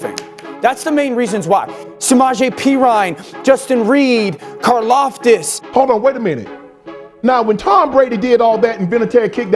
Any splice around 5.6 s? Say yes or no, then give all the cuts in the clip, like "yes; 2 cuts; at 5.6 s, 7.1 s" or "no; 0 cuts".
yes; 2 cuts; at 1.8 s, 5.6 s